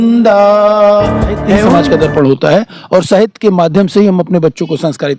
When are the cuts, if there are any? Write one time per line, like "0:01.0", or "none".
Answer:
0:01.8

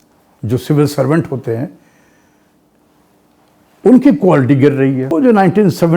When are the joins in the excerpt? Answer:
0:05.0

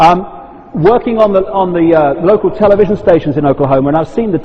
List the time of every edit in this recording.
0:03.3

